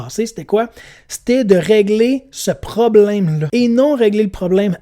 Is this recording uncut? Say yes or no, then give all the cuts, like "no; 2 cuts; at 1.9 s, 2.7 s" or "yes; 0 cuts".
no; 1 cut; at 3.4 s